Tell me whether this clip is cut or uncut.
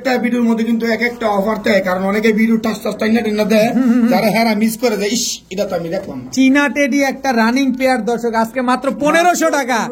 uncut